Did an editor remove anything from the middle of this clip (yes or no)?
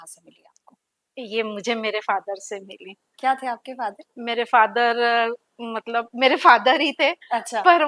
no